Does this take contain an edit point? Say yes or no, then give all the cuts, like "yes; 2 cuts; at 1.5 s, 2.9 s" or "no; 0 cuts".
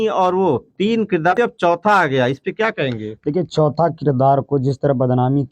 yes; 1 cut; at 1.3 s